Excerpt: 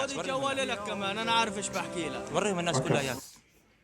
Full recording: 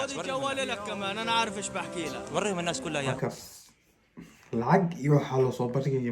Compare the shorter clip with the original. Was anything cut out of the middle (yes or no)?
yes